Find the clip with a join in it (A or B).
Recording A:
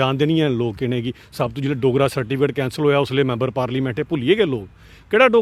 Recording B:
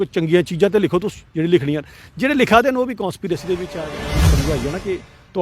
B